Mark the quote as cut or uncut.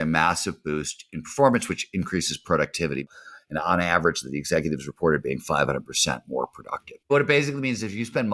cut